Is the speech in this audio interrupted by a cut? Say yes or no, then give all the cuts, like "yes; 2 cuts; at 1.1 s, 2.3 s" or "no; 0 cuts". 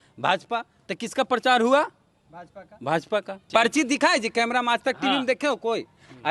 yes; 1 cut; at 3.5 s